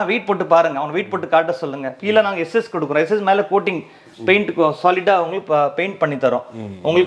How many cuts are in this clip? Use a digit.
0